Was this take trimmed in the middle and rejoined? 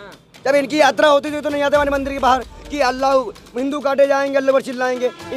no; 0 cuts

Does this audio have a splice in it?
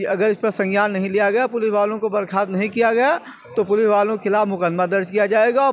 no; 0 cuts

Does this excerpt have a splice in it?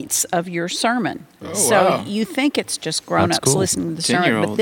no; 0 cuts

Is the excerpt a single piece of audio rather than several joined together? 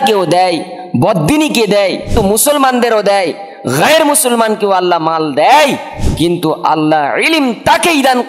no; 1 cut; at 2.1 s

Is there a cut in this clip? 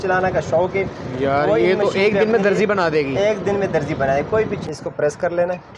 yes; 1 cut; at 4.6 s

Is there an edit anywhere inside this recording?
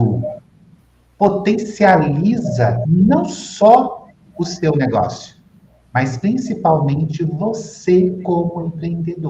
no; 0 cuts

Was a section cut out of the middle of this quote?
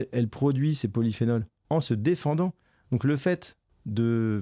no; 0 cuts

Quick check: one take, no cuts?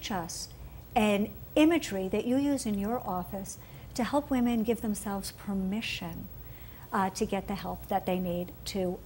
no; 1 cut; at 6.6 s

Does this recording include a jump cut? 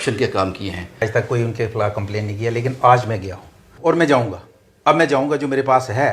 yes; 2 cuts; at 1.0 s, 3.6 s

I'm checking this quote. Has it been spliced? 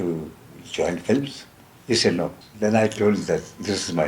yes; 1 cut; at 2.4 s

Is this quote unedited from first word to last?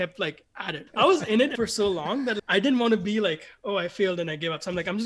no; 2 cuts; at 0.9 s, 2.4 s

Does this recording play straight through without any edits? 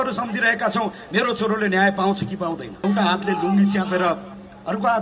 no; 1 cut; at 2.7 s

